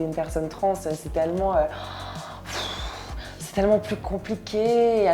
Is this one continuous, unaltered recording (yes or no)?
yes